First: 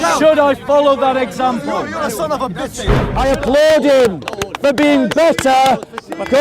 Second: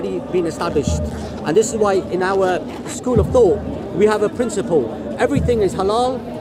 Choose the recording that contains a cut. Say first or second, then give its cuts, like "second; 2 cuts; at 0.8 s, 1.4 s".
first; 1 cut; at 3.0 s